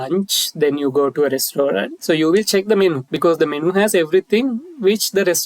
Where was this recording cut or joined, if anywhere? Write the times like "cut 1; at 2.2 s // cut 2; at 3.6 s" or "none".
cut 1; at 1.9 s // cut 2; at 3.1 s